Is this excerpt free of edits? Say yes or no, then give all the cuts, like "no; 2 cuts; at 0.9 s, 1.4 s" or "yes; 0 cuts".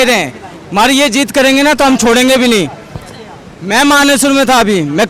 yes; 0 cuts